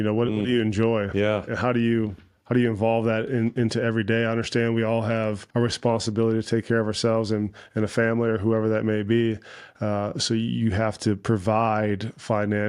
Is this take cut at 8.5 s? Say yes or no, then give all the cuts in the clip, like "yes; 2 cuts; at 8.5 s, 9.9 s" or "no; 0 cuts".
no; 1 cut; at 5.4 s